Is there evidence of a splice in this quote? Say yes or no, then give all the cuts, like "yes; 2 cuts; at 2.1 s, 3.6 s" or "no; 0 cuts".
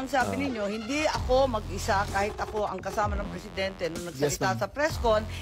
no; 0 cuts